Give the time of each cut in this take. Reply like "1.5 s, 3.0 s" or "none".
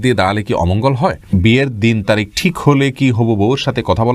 1.3 s